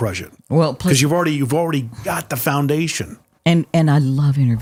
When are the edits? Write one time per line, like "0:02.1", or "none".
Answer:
none